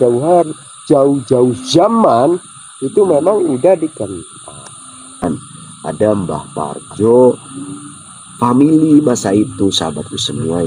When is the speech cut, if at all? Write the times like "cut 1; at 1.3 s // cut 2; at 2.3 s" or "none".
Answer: cut 1; at 5.2 s